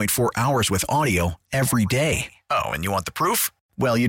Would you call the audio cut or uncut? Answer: uncut